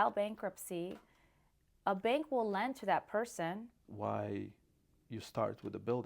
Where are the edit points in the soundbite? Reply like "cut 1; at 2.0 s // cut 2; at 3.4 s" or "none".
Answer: cut 1; at 3.8 s